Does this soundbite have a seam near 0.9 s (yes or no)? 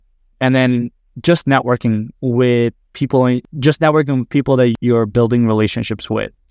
no